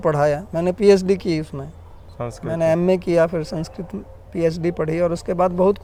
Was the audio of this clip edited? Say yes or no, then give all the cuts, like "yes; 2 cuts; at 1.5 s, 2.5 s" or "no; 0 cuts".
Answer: no; 0 cuts